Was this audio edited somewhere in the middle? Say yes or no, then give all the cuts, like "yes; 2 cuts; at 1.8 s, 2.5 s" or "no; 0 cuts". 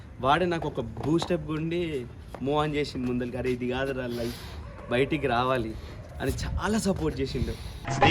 no; 0 cuts